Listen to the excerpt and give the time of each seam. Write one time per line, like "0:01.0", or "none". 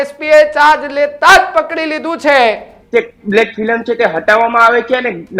0:02.7